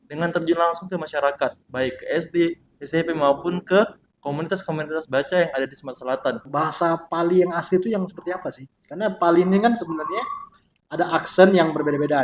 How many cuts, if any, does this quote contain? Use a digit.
1